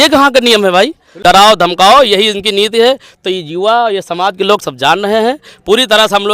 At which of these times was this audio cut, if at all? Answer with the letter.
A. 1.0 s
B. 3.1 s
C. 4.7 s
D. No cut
A